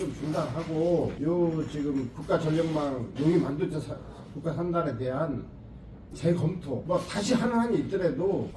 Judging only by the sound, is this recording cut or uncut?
cut